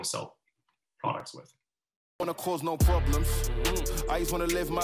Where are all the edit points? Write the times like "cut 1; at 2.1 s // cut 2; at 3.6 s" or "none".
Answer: cut 1; at 2.2 s